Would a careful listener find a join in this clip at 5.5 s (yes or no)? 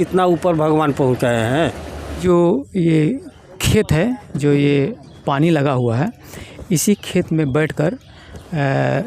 no